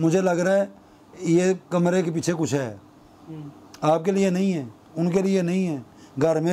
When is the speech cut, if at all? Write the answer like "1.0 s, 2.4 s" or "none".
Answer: none